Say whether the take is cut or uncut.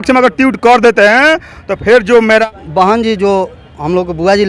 cut